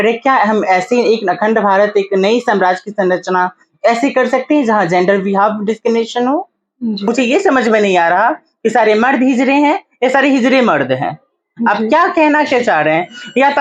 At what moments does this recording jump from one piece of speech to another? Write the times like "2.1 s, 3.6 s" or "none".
7.1 s